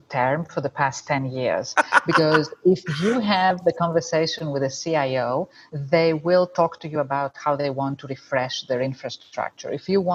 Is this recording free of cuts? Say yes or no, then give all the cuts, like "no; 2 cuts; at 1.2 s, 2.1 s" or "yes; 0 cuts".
yes; 0 cuts